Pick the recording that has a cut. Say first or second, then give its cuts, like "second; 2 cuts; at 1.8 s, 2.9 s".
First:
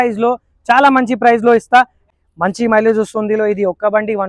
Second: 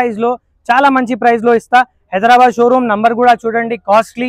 first; 1 cut; at 2.1 s